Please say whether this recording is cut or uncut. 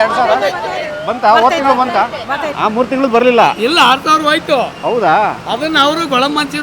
cut